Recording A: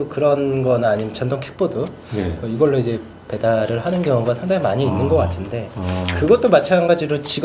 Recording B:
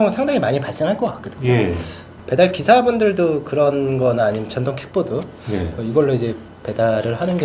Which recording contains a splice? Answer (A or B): B